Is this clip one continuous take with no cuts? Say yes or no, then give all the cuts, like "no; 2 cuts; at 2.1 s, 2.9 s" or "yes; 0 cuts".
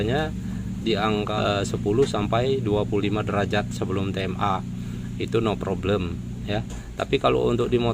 no; 1 cut; at 1.3 s